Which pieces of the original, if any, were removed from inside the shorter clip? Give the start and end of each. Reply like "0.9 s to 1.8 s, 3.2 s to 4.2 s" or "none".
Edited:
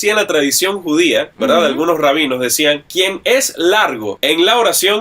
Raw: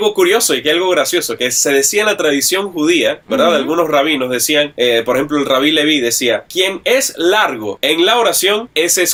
4.7 s to 6.4 s